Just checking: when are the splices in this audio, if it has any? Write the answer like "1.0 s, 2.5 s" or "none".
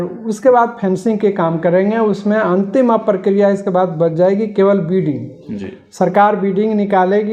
none